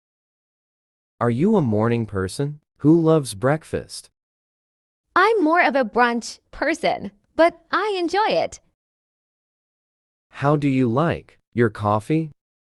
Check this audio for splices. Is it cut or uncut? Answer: uncut